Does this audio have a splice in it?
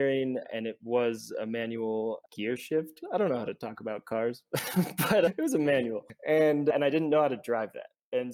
yes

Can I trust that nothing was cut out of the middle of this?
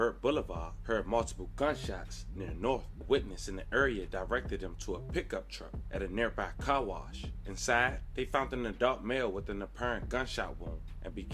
no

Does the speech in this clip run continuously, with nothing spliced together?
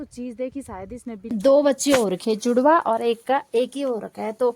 no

